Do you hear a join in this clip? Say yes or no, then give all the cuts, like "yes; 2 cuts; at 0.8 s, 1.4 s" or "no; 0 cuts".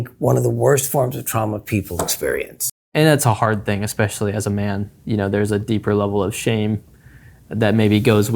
yes; 1 cut; at 2.9 s